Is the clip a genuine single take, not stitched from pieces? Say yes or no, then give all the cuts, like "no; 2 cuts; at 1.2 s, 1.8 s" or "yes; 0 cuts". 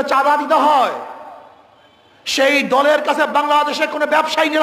yes; 0 cuts